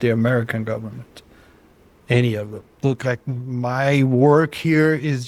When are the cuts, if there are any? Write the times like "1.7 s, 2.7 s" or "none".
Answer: none

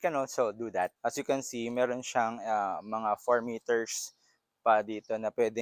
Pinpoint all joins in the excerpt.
0.9 s

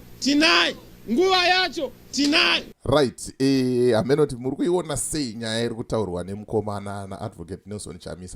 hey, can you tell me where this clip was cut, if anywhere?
2.7 s

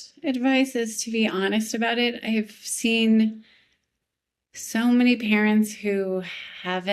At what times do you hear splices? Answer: none

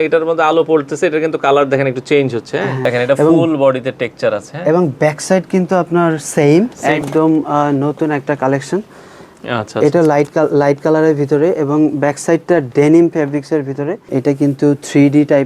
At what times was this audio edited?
2.8 s, 6.8 s, 14.2 s

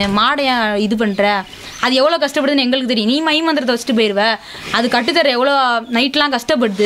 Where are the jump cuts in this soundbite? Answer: none

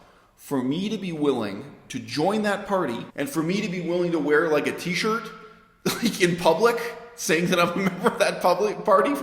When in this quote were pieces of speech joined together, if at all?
3.1 s

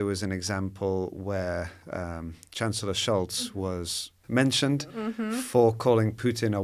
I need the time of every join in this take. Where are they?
4.2 s

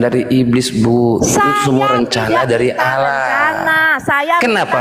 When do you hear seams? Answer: 3.7 s

